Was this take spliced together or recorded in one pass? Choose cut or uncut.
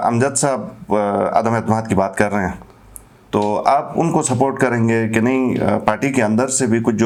uncut